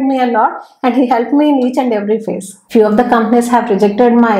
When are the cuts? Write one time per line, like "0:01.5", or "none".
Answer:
0:02.5